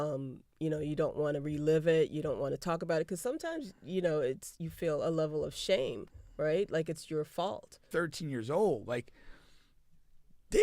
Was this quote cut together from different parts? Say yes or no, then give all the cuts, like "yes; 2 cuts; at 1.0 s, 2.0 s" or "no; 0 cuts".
yes; 1 cut; at 7.8 s